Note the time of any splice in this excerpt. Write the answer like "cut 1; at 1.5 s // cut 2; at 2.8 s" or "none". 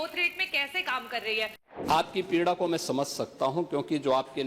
cut 1; at 1.6 s